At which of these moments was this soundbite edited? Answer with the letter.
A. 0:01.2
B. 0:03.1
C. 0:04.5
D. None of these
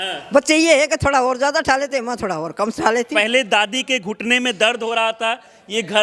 B